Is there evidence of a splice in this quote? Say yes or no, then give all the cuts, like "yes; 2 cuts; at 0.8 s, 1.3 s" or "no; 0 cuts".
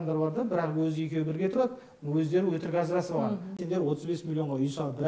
yes; 1 cut; at 3.6 s